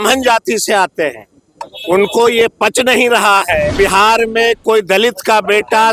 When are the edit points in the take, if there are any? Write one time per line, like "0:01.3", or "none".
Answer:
0:03.7